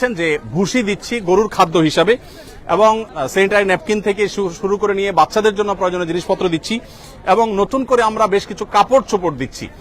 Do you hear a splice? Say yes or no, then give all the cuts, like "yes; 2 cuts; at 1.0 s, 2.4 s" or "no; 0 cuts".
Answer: no; 0 cuts